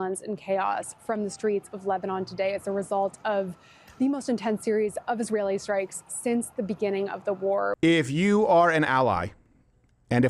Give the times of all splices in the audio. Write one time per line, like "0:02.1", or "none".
0:07.8